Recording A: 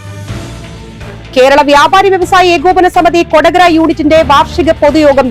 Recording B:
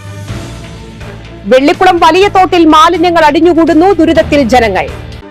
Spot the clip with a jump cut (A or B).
A